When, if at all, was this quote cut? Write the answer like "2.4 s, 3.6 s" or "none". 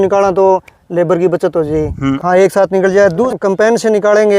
2.2 s, 3.3 s